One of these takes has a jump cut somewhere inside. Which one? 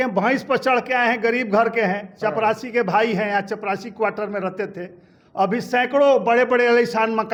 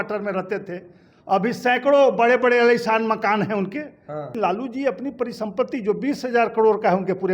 second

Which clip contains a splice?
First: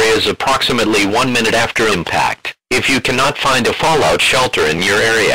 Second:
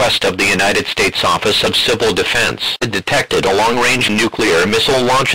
second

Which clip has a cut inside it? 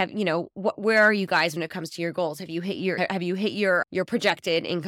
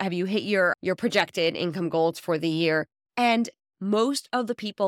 second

